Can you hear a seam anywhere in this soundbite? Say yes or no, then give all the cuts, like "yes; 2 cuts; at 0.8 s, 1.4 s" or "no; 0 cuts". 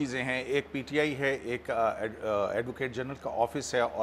no; 0 cuts